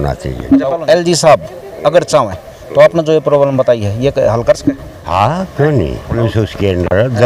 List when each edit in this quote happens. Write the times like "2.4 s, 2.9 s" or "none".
0.8 s, 4.9 s, 6.1 s